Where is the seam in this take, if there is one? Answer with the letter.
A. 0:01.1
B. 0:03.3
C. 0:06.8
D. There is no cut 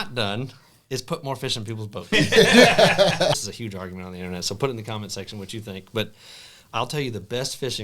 B